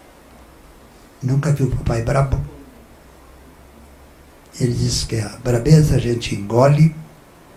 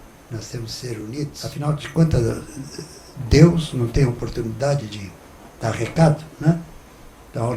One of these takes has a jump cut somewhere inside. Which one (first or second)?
second